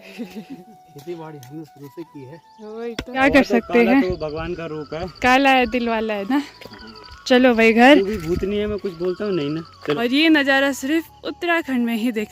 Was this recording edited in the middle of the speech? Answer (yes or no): yes